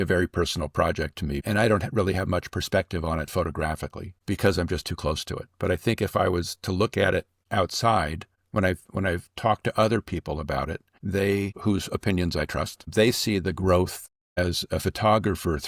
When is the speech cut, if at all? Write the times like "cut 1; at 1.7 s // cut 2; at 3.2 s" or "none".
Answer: cut 1; at 1.4 s